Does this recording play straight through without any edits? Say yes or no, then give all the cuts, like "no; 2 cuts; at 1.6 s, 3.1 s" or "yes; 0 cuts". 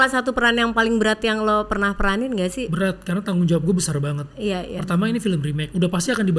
yes; 0 cuts